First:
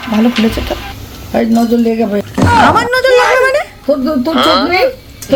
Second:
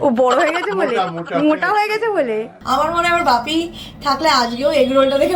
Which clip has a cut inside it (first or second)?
second